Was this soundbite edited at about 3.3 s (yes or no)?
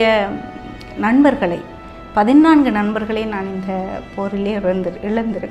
no